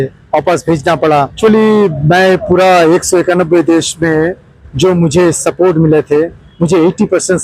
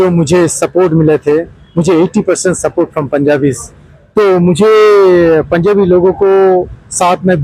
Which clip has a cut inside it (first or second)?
first